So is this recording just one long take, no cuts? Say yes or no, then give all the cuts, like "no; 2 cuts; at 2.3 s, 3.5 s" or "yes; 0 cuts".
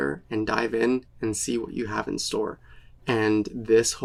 yes; 0 cuts